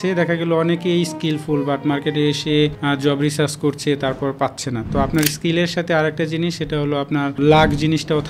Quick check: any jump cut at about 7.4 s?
yes; 2 cuts; at 2.8 s, 7.4 s

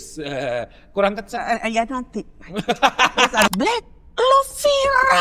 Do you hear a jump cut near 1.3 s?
no; 1 cut; at 3.5 s

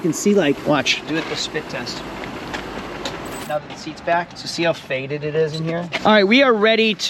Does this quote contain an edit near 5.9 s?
yes; 2 cuts; at 3.4 s, 5.9 s

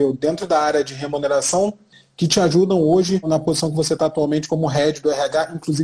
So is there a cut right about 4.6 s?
no; 2 cuts; at 2.0 s, 3.3 s

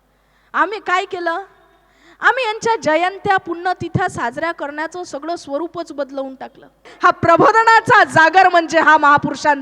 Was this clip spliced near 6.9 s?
yes; 1 cut; at 6.9 s

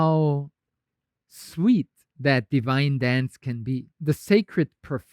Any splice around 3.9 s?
yes; 1 cut; at 3.9 s

